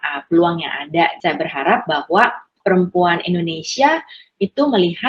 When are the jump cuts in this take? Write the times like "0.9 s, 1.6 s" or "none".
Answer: 1.2 s, 2.5 s